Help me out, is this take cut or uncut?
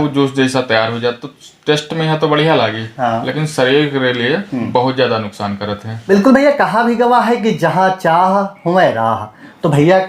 cut